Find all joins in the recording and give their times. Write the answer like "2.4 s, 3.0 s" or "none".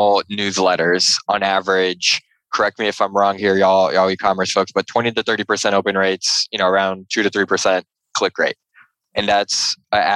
2.5 s